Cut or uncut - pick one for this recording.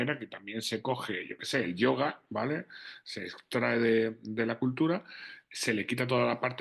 uncut